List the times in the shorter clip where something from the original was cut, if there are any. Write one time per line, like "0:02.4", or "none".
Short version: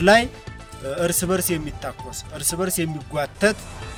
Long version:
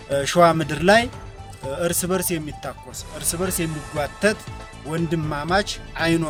none

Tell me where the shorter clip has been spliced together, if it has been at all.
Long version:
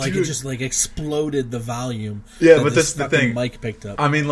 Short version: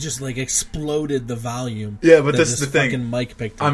0:01.9

